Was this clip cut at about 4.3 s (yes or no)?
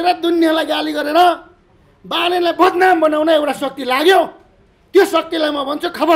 no